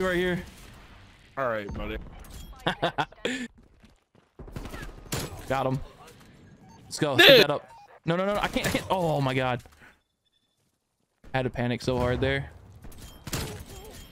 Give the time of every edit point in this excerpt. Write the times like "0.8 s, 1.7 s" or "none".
3.5 s